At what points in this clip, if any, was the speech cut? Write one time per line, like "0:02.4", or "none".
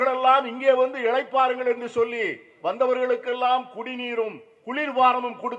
none